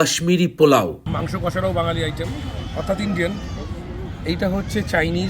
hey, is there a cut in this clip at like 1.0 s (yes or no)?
yes